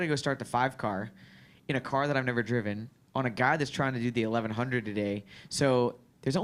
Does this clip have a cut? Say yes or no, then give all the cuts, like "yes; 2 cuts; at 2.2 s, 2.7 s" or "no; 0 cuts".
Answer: no; 0 cuts